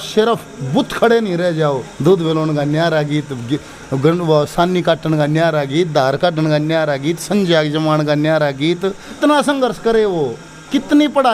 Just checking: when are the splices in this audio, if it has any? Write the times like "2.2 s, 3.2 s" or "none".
1.9 s, 9.2 s